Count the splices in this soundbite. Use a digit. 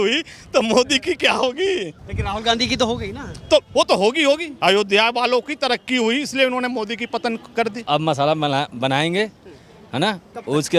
3